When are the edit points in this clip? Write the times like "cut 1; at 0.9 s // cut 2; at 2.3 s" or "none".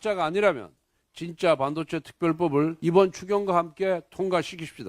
cut 1; at 2.8 s